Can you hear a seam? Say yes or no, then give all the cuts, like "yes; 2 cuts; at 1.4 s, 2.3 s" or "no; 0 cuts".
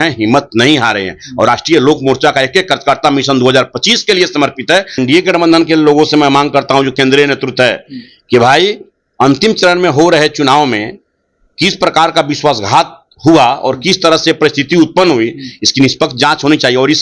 yes; 1 cut; at 5.0 s